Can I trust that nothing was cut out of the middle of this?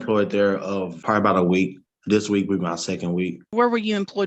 no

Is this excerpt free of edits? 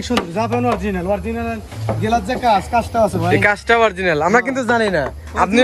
yes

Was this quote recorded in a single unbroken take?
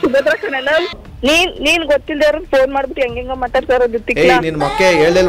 no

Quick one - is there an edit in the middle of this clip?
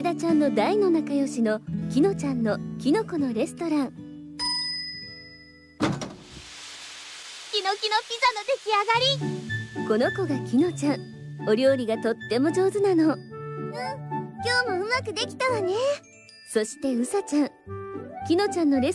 yes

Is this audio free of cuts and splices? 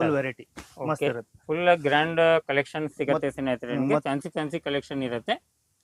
yes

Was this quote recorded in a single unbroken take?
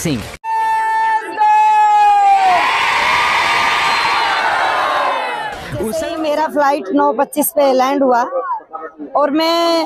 no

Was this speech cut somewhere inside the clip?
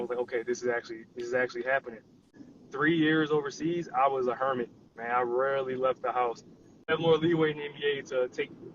yes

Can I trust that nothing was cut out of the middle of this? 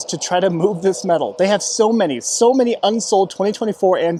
yes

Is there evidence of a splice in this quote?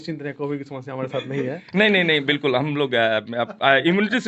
no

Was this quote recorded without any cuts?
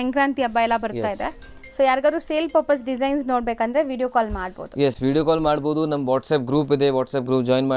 yes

